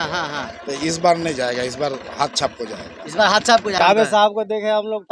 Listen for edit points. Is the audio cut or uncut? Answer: cut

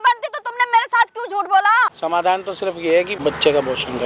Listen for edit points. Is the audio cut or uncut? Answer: cut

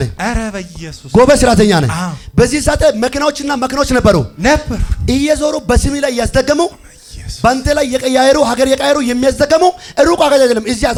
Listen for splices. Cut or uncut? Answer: uncut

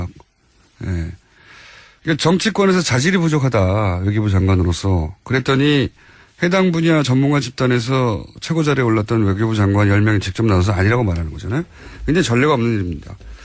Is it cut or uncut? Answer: cut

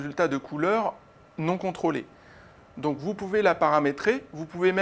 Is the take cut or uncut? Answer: cut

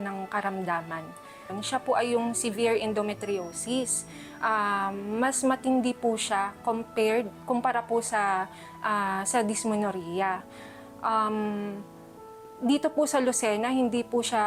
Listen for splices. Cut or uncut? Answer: uncut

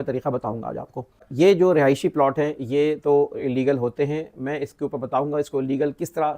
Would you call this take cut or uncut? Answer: cut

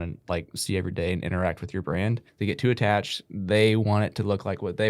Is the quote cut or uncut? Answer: cut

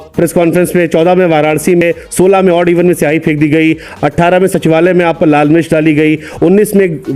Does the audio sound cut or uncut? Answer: uncut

